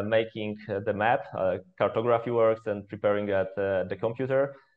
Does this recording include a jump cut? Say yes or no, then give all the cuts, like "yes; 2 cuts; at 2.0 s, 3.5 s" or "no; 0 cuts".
no; 0 cuts